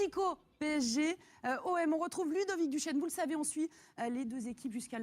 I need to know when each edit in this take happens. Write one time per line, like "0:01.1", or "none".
0:03.0